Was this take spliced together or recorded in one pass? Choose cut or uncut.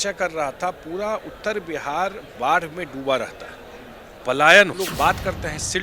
cut